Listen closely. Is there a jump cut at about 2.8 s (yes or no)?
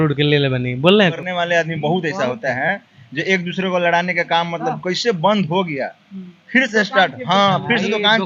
no